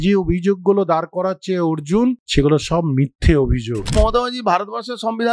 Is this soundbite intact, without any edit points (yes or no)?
no